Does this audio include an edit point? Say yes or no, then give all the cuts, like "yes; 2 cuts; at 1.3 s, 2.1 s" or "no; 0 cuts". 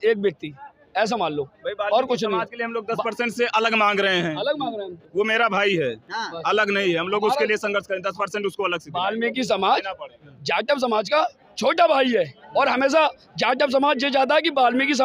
no; 0 cuts